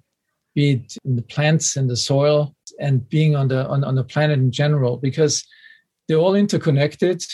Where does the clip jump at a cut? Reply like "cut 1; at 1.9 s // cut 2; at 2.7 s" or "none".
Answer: cut 1; at 0.9 s // cut 2; at 2.7 s